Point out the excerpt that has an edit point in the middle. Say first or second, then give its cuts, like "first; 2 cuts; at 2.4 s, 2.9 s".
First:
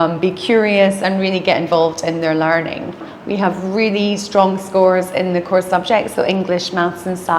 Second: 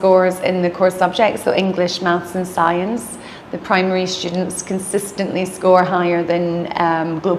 first; 1 cut; at 3.1 s